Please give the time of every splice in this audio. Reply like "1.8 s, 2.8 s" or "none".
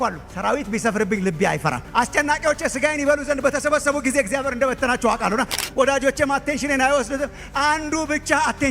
5.6 s